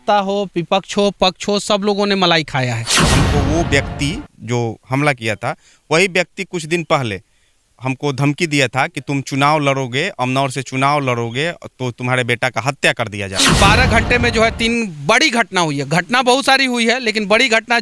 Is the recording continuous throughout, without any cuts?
no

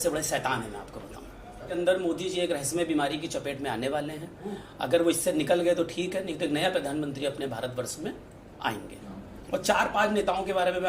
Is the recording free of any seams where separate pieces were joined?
no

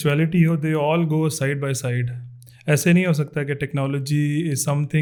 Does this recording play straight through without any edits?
yes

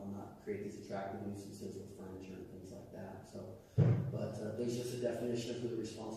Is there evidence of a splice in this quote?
no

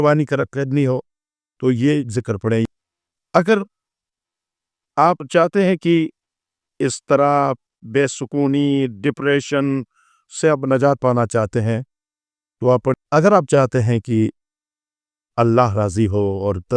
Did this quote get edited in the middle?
yes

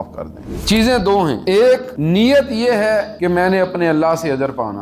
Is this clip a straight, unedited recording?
yes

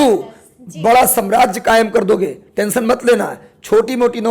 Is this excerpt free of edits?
yes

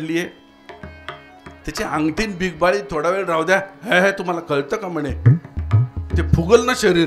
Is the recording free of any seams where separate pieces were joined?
yes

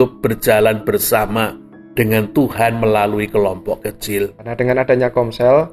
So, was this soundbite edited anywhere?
yes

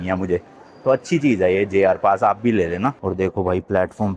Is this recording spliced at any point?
yes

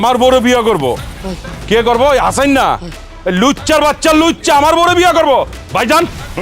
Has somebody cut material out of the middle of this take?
yes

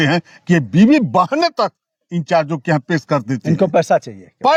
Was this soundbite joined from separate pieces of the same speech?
no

